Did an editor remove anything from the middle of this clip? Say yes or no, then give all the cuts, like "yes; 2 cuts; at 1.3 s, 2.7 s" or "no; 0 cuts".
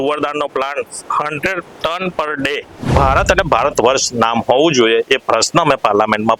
yes; 1 cut; at 2.9 s